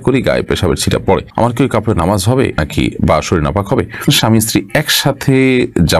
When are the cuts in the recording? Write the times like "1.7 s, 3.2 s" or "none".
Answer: 1.3 s, 2.6 s, 4.1 s